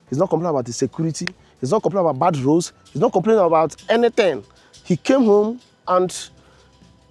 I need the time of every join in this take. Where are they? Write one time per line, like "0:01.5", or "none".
none